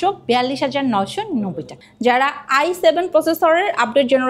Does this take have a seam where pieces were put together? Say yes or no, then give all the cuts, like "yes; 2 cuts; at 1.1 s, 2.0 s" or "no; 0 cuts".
yes; 1 cut; at 1.8 s